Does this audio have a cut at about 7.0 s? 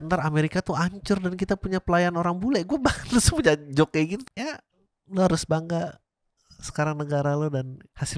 no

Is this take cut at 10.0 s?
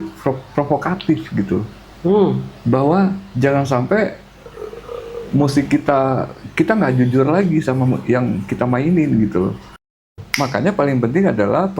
yes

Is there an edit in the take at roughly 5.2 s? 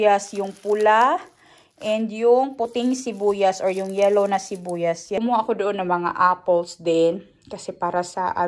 yes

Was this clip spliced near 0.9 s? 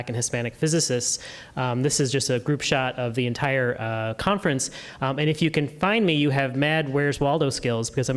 no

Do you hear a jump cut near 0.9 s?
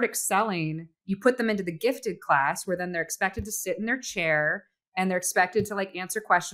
yes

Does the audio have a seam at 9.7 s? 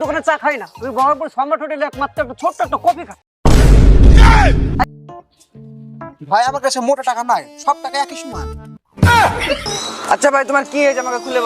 yes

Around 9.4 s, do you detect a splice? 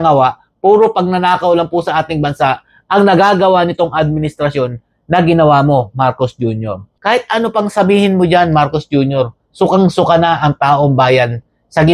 no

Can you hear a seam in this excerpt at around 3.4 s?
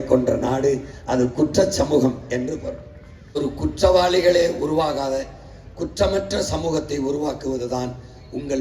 yes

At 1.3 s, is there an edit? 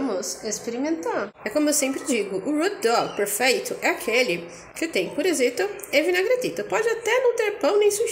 yes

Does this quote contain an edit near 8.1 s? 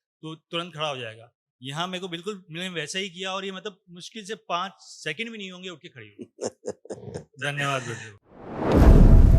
yes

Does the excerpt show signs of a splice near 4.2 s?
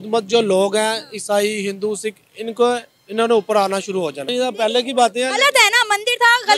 yes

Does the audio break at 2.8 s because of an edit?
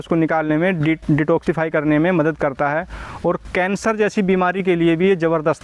no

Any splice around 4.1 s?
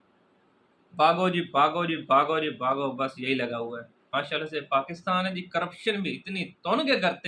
yes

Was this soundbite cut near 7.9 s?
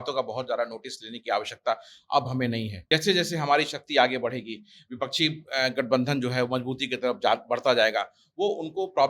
no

